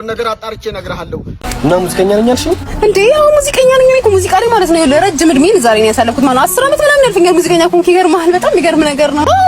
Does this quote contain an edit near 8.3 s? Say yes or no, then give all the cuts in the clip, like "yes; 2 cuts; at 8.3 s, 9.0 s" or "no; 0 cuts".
no; 1 cut; at 1.4 s